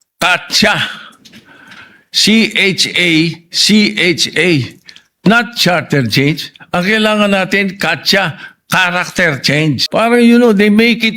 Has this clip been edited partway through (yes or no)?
yes